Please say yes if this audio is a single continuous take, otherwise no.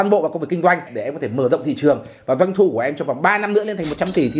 no